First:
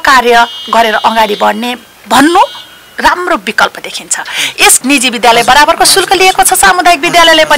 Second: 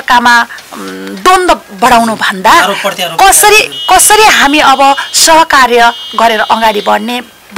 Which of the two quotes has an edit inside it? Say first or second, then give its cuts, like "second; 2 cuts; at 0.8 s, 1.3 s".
first; 1 cut; at 4.8 s